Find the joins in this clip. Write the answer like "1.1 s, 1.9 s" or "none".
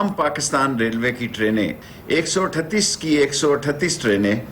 1.8 s